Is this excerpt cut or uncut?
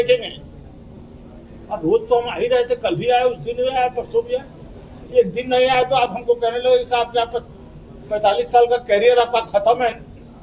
uncut